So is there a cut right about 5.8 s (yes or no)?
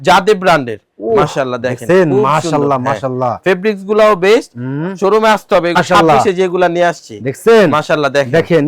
yes